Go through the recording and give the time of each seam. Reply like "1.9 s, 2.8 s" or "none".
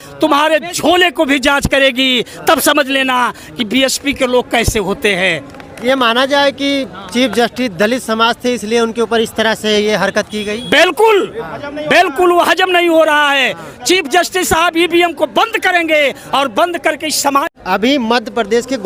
none